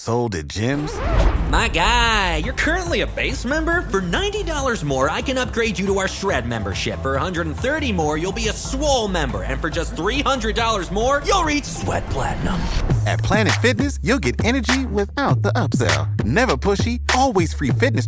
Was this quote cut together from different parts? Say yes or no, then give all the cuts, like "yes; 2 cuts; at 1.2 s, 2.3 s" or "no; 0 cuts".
no; 0 cuts